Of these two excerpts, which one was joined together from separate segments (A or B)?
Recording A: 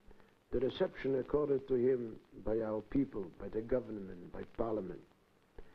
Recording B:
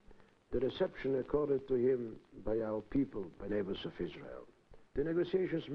A